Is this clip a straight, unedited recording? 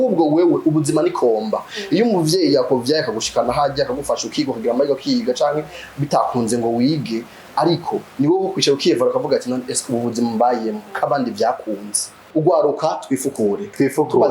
no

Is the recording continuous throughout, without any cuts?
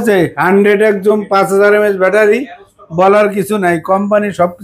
yes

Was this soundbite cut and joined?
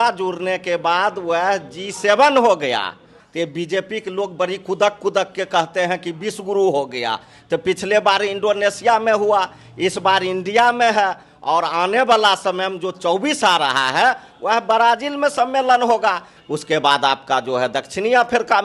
yes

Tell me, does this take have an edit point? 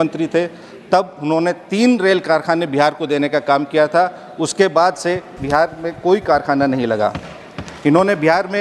no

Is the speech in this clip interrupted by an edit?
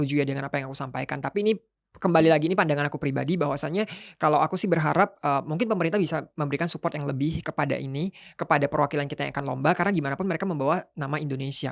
no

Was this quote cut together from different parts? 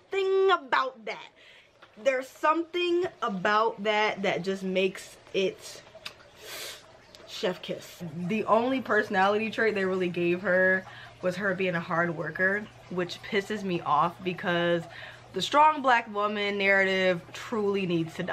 yes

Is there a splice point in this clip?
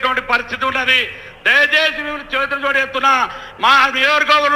no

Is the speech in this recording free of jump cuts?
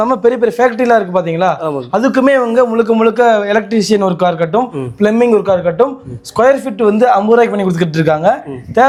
yes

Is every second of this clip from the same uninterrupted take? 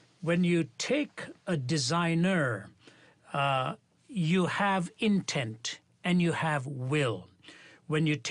no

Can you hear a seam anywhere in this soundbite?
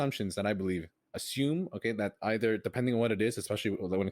yes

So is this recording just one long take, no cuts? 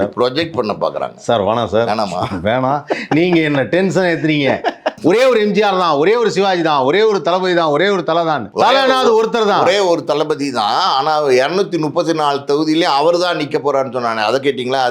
no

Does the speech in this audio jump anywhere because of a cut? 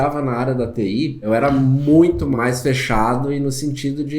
yes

